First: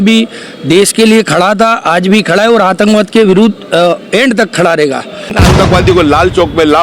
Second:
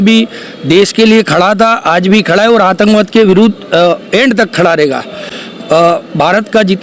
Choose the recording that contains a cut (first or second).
first